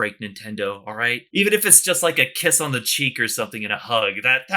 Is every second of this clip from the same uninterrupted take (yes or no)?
no